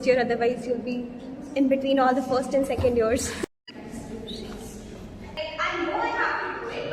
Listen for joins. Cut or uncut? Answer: cut